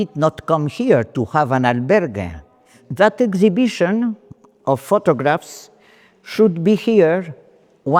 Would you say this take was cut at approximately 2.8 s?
yes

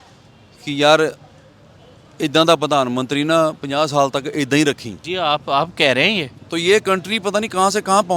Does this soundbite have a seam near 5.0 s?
yes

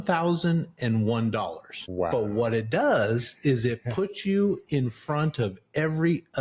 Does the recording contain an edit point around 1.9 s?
yes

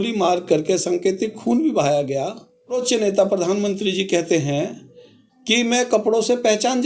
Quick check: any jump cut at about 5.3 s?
no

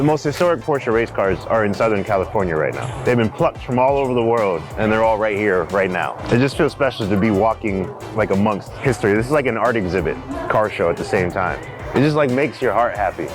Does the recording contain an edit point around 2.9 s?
yes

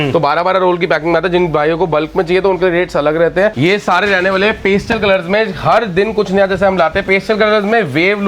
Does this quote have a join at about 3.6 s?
yes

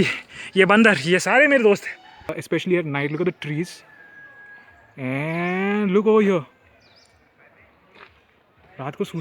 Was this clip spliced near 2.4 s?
yes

